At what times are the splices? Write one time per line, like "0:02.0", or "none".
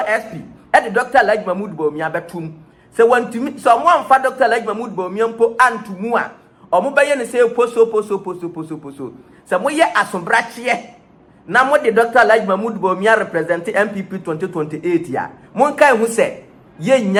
none